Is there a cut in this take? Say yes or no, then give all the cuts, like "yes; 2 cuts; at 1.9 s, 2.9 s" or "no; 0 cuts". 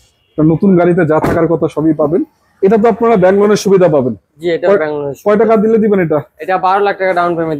no; 0 cuts